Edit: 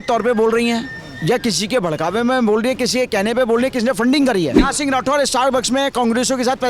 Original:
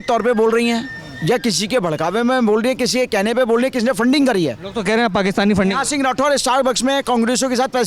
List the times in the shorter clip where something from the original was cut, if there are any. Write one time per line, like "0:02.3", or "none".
0:04.6